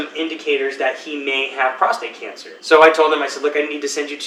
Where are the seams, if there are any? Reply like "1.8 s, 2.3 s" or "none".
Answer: none